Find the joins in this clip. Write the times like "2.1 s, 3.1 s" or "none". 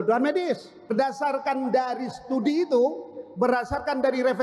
0.9 s